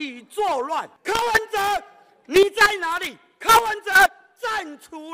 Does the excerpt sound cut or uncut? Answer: cut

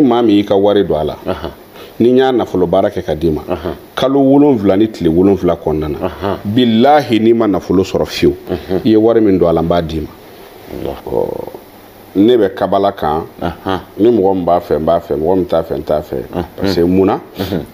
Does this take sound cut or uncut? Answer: cut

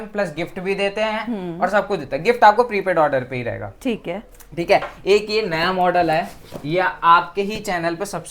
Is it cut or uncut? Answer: uncut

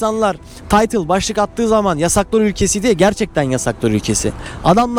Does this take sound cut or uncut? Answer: uncut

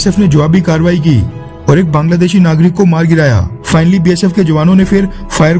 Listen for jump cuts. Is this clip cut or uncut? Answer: cut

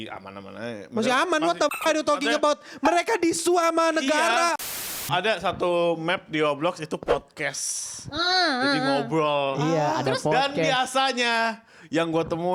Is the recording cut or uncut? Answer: cut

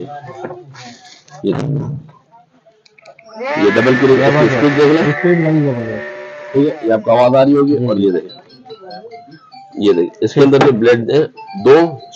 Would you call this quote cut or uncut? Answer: uncut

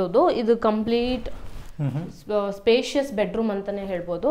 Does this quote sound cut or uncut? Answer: uncut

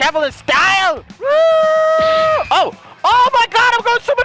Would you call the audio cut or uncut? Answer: cut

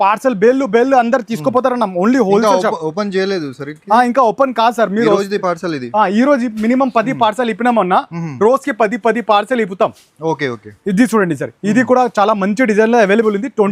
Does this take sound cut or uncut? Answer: uncut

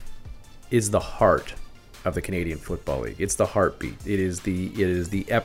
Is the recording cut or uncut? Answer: cut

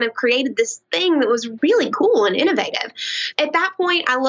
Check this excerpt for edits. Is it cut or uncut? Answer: cut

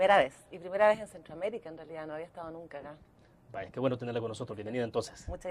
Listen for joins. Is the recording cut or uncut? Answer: cut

